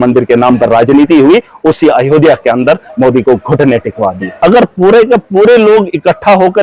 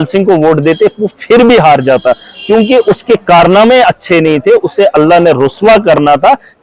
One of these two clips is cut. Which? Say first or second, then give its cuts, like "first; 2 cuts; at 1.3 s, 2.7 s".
first; 1 cut; at 4.3 s